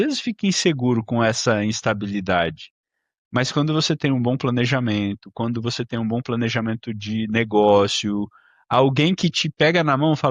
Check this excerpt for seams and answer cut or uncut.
uncut